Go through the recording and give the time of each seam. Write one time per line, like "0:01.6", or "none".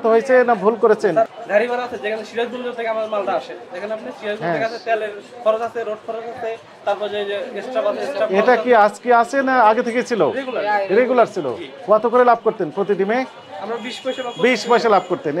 0:01.3